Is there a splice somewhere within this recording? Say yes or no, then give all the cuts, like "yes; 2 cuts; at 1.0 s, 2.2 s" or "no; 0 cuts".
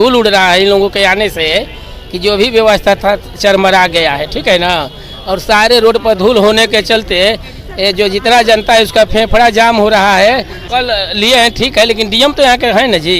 yes; 1 cut; at 10.6 s